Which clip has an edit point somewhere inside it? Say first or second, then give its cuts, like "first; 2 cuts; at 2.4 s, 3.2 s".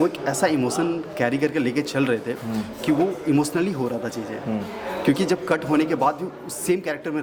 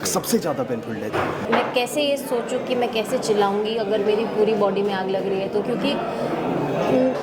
second; 1 cut; at 1.4 s